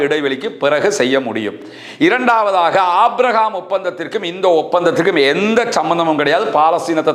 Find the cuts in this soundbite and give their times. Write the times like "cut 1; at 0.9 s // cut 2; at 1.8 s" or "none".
none